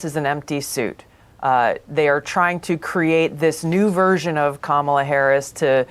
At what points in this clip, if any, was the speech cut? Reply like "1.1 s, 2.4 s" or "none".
none